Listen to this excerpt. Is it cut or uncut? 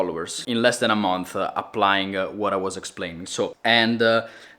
cut